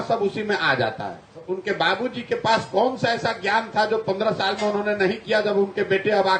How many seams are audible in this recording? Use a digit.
1